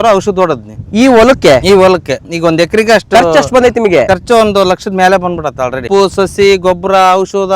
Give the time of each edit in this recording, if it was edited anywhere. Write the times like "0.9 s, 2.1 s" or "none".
5.9 s